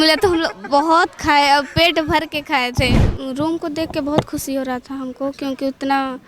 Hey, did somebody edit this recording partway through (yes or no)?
yes